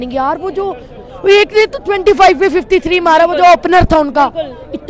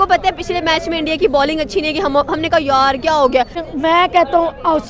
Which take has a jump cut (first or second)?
second